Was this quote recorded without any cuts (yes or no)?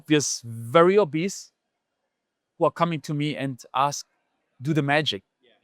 yes